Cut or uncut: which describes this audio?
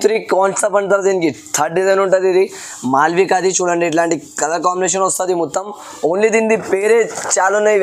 uncut